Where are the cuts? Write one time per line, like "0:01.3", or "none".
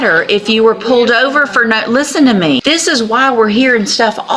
0:02.6

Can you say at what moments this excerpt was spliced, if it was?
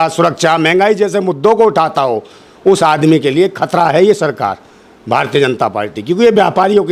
none

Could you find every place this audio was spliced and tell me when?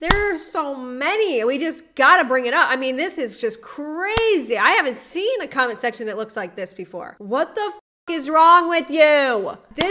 0:07.1

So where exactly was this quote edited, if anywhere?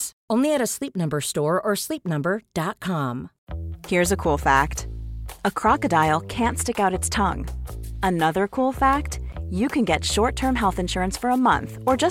0:03.4

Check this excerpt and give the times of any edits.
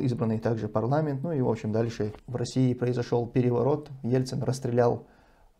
0:02.2

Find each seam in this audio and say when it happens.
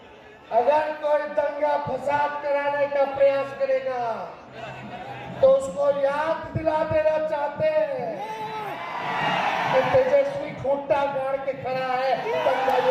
none

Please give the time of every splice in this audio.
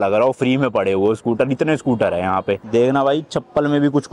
0:02.6

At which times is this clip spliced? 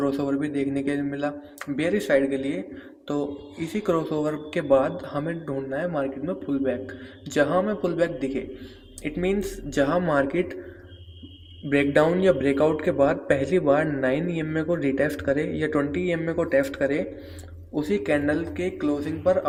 none

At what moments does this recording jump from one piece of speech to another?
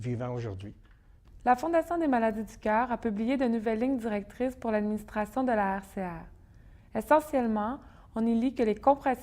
0:06.3

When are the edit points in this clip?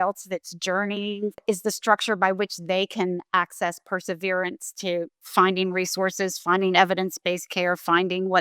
0:01.4
0:05.2

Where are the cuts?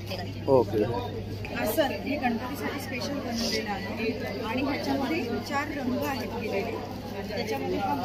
0:01.5

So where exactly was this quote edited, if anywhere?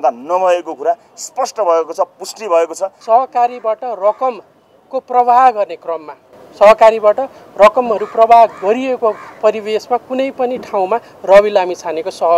0:02.9

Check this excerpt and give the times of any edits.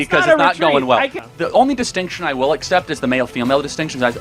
0:01.2

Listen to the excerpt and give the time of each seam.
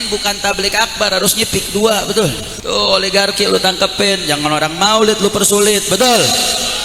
0:02.5

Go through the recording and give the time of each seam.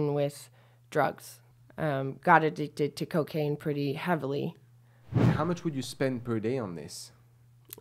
0:05.2

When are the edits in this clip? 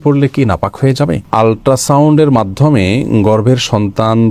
0:01.2

